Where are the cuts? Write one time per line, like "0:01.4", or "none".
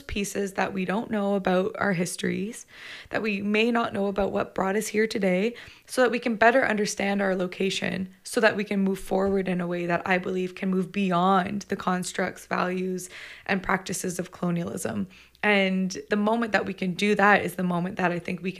0:16.0